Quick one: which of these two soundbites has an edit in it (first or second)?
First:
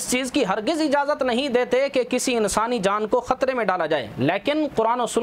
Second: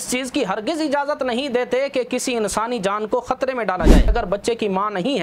second